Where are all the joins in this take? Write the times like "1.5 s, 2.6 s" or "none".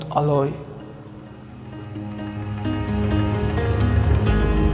none